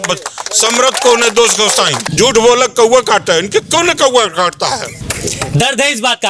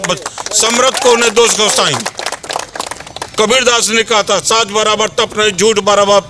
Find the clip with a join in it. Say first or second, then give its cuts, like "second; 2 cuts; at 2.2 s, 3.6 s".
first; 2 cuts; at 2.0 s, 5.0 s